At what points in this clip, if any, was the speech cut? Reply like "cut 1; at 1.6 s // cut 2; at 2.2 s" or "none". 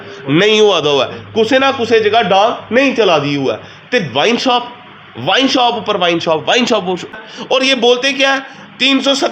cut 1; at 7.2 s